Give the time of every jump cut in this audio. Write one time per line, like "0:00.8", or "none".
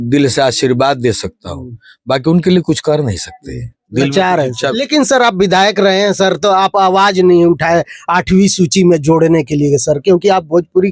0:04.8